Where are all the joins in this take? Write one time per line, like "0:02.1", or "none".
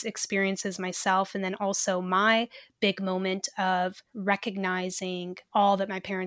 0:04.1
0:05.4